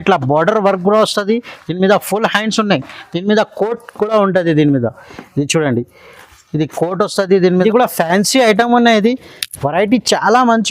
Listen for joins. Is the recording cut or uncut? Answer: cut